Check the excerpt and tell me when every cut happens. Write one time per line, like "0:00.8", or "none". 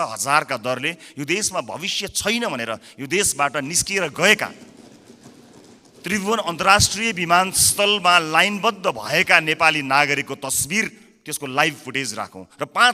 none